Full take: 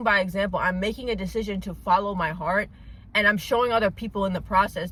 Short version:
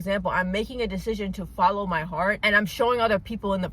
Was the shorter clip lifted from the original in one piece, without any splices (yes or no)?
no